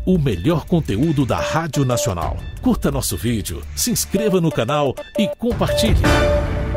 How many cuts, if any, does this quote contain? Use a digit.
2